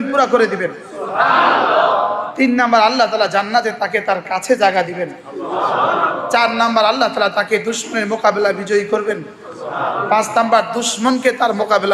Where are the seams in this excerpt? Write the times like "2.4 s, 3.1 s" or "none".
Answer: none